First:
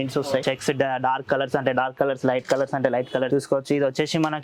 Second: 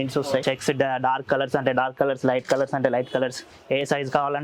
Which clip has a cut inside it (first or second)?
first